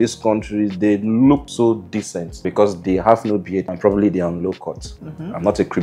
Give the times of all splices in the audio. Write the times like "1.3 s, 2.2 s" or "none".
4.9 s

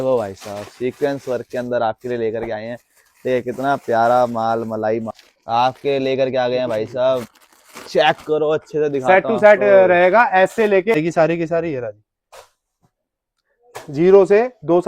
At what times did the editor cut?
5.1 s, 10.9 s

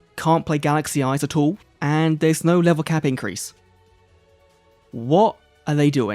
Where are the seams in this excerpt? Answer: 1.6 s

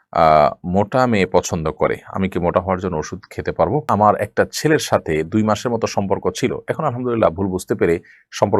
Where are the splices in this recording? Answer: 3.8 s

